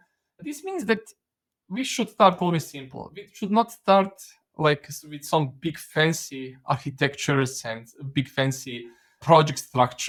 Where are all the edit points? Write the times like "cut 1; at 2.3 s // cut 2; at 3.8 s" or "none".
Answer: none